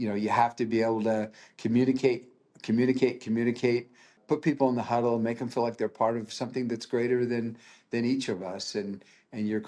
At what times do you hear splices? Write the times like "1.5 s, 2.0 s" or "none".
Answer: 4.2 s